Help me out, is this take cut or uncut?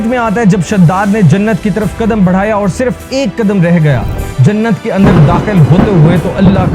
uncut